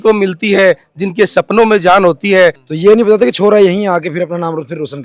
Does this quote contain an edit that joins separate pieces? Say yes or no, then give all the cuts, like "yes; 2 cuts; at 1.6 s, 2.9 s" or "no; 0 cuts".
yes; 1 cut; at 2.7 s